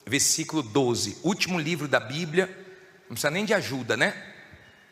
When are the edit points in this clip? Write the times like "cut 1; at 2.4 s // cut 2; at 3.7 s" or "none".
cut 1; at 2.5 s